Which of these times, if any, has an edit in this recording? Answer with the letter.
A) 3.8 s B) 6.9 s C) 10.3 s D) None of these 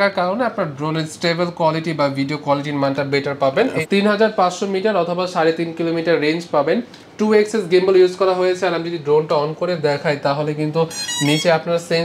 A